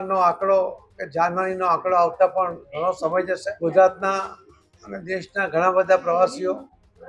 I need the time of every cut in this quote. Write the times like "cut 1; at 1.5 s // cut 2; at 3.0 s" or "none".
cut 1; at 3.5 s